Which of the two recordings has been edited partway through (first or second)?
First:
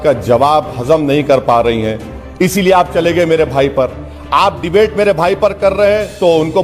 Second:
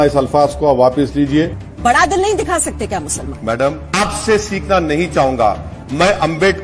second